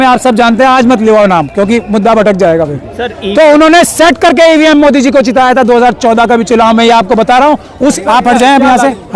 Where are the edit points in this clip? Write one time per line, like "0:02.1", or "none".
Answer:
0:08.0